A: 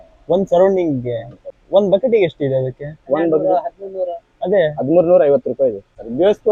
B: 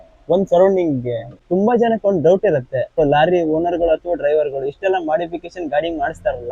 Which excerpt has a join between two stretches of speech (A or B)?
B